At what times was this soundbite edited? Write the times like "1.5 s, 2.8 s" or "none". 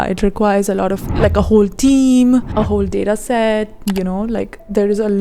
2.5 s, 3.7 s